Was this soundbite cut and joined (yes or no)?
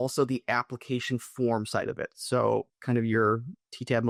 no